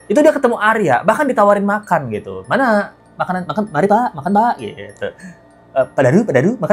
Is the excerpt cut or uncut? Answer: uncut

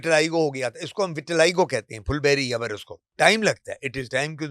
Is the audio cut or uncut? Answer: cut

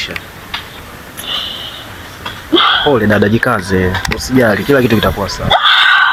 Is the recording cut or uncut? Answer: uncut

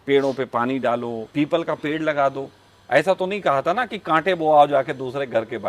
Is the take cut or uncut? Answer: cut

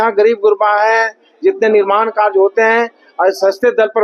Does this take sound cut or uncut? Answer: uncut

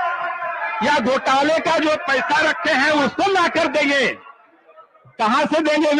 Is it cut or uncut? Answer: uncut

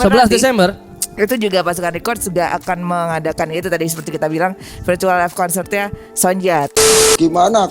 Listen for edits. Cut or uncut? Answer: cut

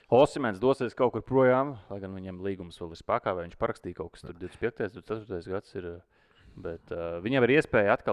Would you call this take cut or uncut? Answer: uncut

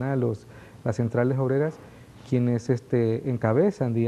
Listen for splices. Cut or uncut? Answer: uncut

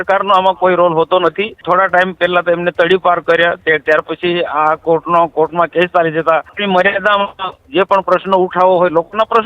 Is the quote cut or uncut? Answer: cut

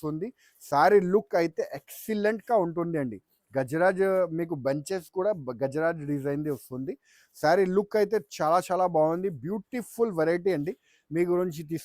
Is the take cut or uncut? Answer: uncut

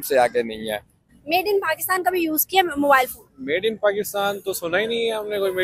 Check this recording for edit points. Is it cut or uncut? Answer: cut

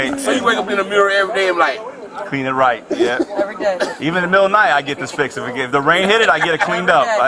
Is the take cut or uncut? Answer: uncut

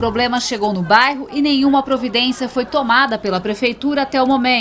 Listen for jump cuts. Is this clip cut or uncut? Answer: cut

